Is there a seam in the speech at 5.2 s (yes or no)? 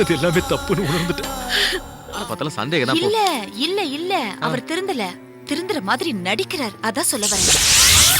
no